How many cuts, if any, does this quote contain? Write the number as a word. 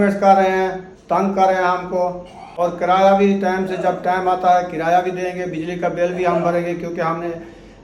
one